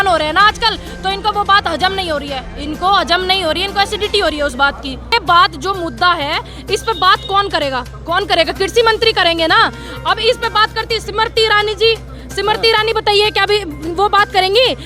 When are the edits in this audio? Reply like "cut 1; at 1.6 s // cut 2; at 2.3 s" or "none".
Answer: cut 1; at 5.1 s